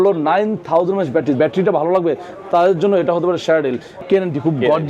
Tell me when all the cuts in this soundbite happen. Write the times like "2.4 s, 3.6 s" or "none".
1.3 s, 4.0 s